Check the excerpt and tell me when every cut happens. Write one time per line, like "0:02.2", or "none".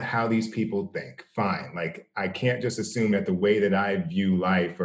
none